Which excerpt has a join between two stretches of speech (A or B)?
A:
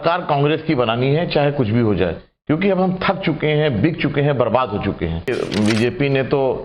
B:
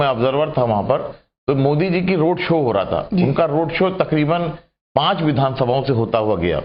A